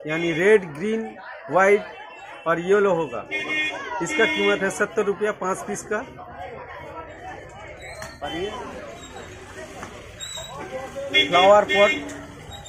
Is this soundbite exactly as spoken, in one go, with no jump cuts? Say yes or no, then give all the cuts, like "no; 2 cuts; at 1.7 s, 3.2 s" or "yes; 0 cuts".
no; 1 cut; at 8.5 s